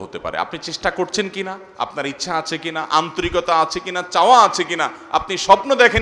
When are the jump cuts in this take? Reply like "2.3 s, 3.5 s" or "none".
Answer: none